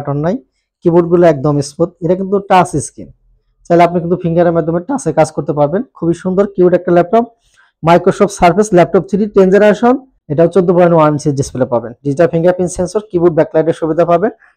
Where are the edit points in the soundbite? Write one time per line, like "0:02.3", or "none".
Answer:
0:10.2